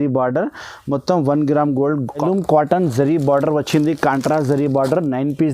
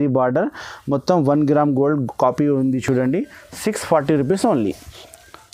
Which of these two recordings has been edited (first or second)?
first